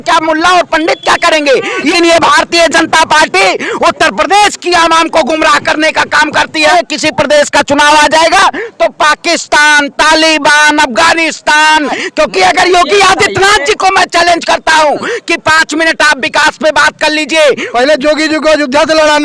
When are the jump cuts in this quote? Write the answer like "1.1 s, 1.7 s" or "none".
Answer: 1.9 s, 6.7 s, 12.0 s, 17.6 s